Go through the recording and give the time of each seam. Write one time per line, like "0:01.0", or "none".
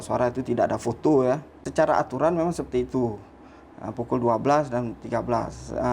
0:01.5